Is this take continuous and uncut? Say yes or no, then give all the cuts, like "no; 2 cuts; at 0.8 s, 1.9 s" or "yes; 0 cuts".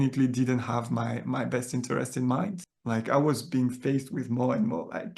no; 1 cut; at 2.7 s